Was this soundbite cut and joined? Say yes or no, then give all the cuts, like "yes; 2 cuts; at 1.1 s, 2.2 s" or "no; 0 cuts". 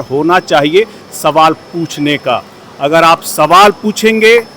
no; 0 cuts